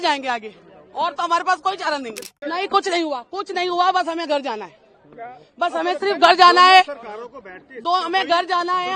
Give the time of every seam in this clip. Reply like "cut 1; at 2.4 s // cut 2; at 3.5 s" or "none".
cut 1; at 2.2 s